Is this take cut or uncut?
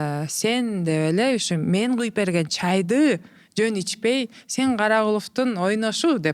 uncut